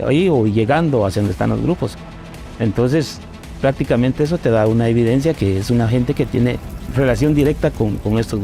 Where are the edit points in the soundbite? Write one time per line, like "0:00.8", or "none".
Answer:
0:06.8